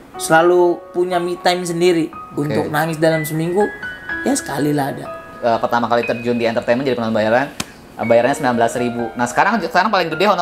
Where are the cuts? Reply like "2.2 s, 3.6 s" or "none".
5.3 s